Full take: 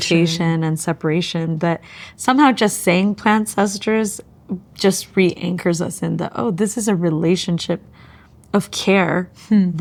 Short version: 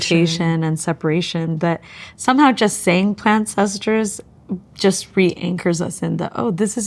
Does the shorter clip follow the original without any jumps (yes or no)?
yes